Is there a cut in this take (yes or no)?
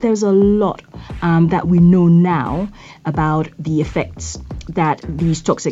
no